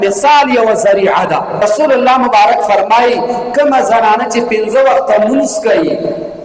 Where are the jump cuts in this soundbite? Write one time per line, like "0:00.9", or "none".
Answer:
0:01.6